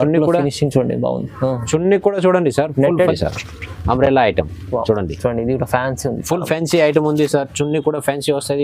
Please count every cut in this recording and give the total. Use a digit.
1